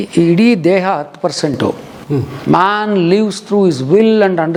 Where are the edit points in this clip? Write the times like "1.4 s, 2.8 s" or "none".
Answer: none